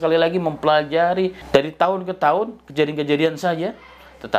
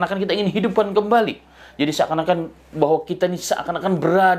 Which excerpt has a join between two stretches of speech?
first; 1 cut; at 1.4 s

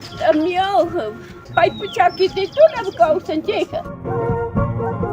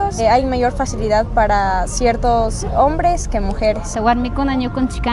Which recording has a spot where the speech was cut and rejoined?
first; 1 cut; at 3.9 s

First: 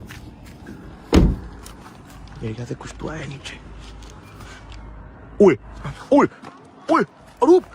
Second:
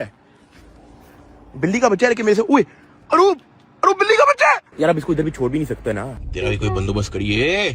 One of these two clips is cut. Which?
second; 2 cuts; at 4.7 s, 6.1 s

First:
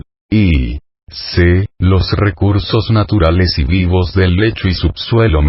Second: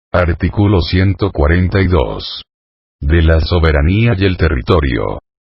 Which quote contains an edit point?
second; 1 cut; at 1.3 s

